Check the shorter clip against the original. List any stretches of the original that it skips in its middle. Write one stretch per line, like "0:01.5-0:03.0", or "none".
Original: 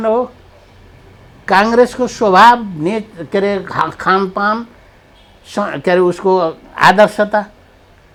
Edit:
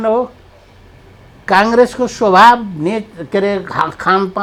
none